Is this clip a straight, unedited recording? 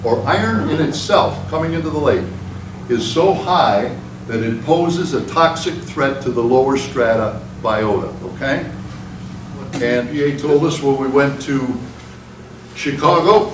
no; 1 cut; at 10.1 s

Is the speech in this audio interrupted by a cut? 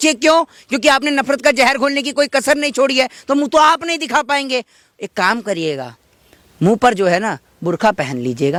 no; 0 cuts

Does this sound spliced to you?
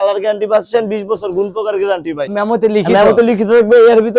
no; 0 cuts

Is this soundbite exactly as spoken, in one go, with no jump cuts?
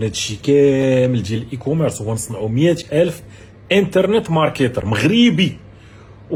yes; 0 cuts

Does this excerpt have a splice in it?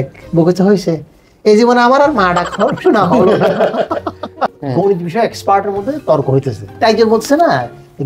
yes; 2 cuts; at 4.4 s, 6.6 s

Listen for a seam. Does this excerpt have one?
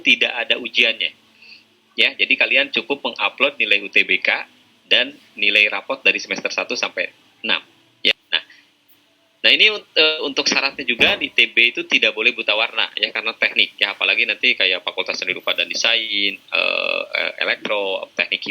yes; 1 cut; at 8.1 s

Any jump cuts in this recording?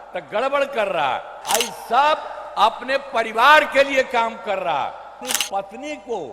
yes; 2 cuts; at 1.3 s, 5.2 s

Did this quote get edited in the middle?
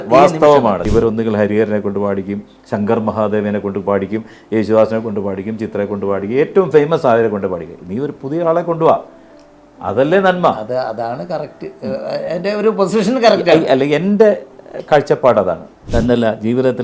yes; 2 cuts; at 0.8 s, 15.7 s

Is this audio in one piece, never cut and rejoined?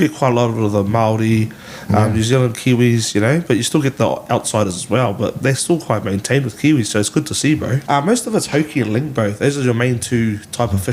no; 1 cut; at 7.8 s

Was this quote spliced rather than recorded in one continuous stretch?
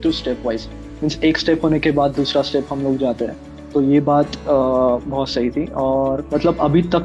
no; 0 cuts

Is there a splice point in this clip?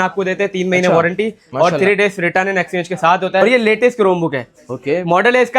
yes; 1 cut; at 3.4 s

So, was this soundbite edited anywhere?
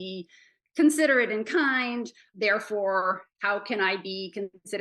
yes; 1 cut; at 2.3 s

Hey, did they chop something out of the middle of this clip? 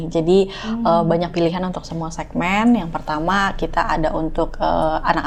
no; 0 cuts

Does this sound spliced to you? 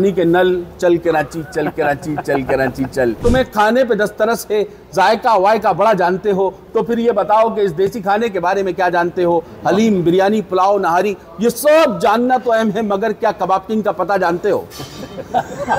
yes; 1 cut; at 3.2 s

